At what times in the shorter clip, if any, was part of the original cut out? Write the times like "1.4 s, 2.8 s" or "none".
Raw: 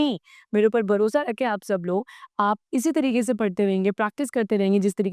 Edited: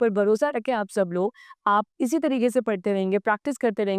none